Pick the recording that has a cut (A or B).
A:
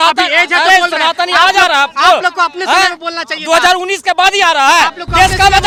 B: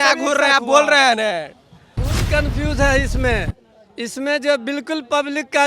B